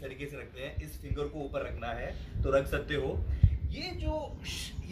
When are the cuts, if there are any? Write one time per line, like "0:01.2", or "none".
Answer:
none